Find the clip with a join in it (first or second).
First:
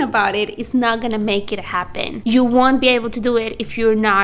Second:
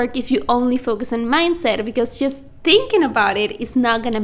first